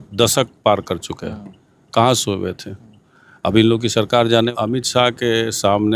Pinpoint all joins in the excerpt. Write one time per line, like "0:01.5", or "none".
0:04.5